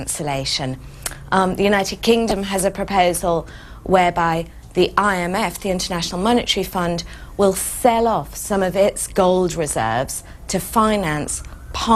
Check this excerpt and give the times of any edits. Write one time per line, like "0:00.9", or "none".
0:01.5